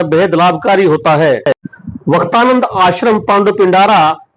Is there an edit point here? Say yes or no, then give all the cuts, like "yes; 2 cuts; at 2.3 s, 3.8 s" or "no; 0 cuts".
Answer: yes; 1 cut; at 1.7 s